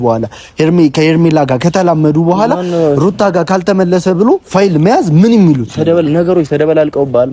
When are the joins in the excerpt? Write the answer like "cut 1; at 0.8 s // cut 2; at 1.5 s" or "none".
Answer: none